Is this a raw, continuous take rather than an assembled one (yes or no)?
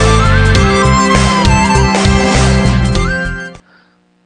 no